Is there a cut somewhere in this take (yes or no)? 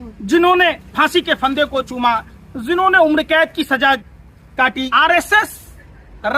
yes